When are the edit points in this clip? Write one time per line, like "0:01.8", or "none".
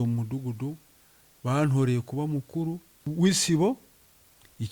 0:03.0